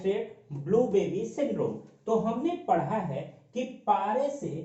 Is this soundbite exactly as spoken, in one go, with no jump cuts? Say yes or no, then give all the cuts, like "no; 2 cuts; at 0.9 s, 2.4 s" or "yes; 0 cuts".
yes; 0 cuts